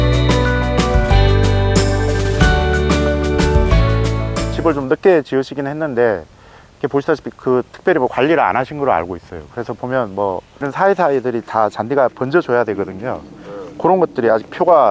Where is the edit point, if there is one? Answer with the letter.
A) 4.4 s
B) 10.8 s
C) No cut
A